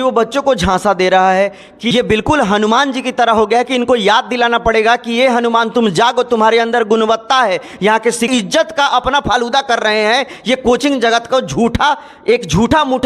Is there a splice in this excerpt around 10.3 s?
no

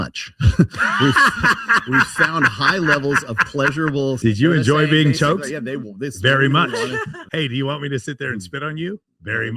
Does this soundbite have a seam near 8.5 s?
no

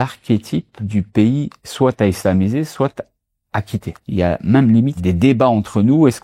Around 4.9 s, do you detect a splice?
yes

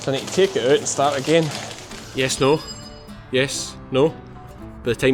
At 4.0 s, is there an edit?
no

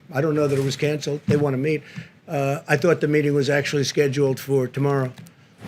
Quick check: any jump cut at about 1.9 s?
no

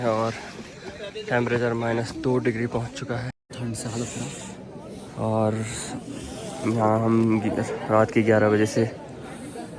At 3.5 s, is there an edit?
yes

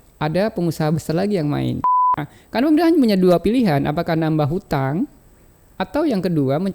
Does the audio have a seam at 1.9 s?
yes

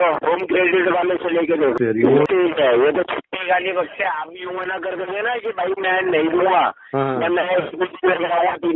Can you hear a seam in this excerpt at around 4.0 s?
no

